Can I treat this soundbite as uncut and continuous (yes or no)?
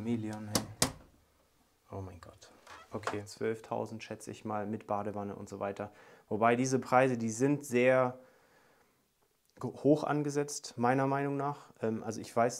no